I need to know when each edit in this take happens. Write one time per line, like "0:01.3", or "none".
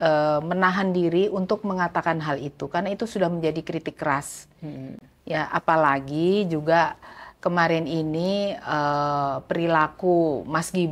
none